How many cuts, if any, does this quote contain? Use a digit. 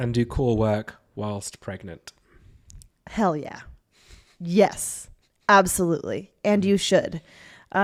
0